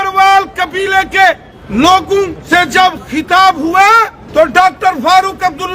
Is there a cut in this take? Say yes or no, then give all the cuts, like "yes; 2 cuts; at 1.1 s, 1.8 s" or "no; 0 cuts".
yes; 3 cuts; at 1.5 s, 2.4 s, 4.2 s